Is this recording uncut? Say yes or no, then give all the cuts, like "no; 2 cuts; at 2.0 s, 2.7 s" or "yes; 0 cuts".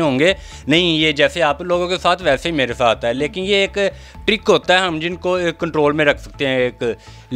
yes; 0 cuts